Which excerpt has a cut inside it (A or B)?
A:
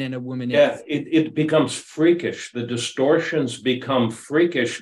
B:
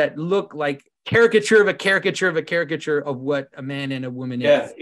B